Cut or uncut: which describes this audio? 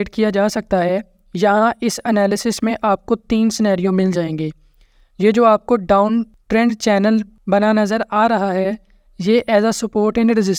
uncut